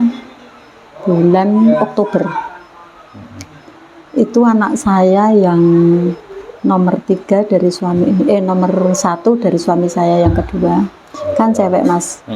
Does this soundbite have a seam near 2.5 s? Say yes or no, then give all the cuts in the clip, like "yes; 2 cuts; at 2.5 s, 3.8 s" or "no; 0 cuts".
no; 0 cuts